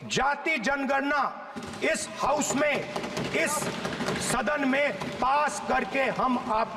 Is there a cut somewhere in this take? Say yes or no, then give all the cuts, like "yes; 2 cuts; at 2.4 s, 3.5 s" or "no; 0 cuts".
no; 0 cuts